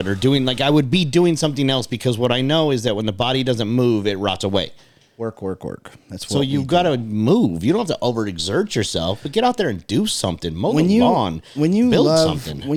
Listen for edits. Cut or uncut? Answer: uncut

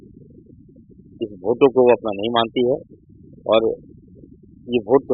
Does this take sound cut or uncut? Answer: uncut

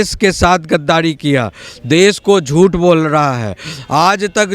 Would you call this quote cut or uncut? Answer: uncut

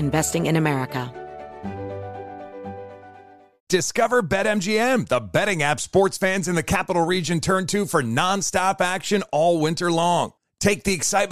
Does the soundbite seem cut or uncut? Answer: cut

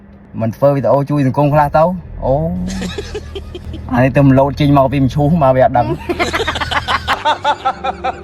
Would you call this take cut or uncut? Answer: cut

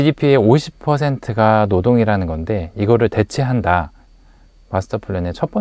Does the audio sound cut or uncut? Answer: uncut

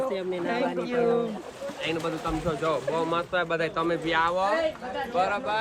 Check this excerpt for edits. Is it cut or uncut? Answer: uncut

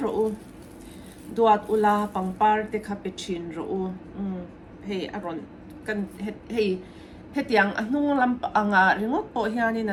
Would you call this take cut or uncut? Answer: uncut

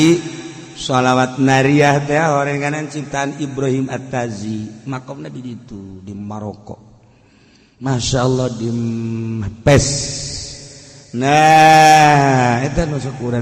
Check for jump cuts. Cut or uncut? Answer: uncut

